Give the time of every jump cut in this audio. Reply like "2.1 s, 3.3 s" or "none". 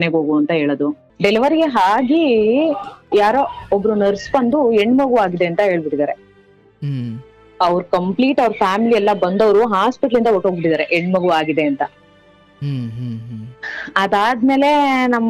1.1 s

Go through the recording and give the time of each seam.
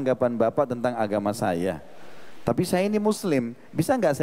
none

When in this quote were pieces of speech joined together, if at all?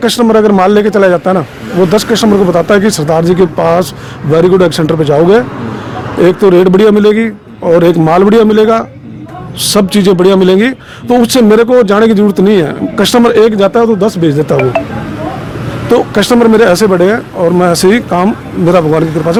none

